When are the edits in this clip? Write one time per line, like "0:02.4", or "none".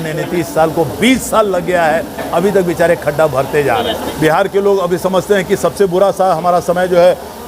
0:04.0